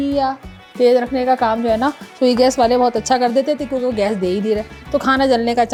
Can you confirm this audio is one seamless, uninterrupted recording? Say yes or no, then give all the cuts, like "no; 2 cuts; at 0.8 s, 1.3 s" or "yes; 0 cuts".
yes; 0 cuts